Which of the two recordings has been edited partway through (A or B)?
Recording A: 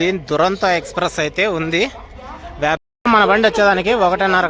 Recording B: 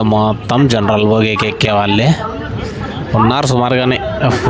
A